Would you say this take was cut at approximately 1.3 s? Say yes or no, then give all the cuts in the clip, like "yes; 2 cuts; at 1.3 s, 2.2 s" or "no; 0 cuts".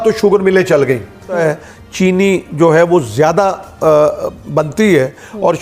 yes; 1 cut; at 1.3 s